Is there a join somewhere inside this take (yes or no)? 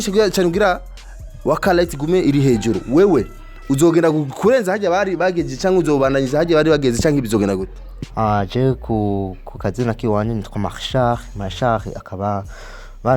yes